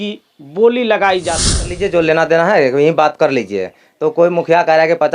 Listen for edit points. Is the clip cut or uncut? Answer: cut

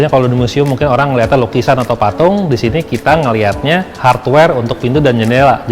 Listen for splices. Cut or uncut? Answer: cut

